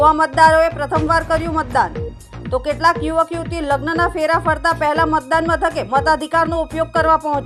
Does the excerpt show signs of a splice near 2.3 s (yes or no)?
no